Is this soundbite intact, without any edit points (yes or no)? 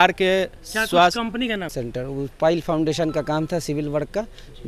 no